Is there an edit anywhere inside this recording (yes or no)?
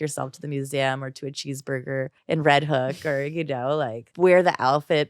yes